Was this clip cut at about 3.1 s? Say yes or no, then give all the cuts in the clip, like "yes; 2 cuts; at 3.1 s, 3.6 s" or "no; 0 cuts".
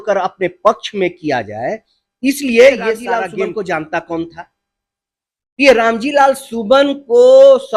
yes; 1 cut; at 3.1 s